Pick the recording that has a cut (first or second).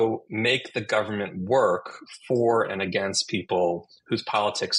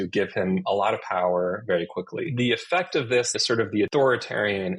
second